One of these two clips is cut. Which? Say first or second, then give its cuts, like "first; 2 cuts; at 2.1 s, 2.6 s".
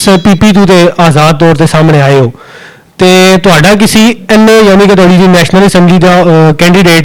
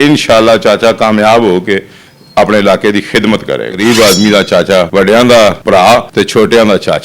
second; 3 cuts; at 3.7 s, 4.9 s, 5.9 s